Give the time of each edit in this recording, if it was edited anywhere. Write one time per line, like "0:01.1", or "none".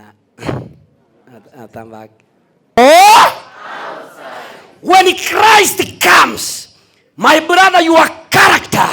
0:02.6